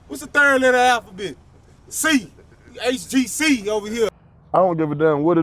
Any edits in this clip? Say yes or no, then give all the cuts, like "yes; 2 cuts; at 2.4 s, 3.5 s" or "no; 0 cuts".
yes; 1 cut; at 4.1 s